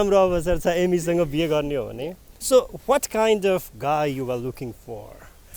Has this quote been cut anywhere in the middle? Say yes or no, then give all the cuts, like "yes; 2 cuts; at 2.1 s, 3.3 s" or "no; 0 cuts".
no; 0 cuts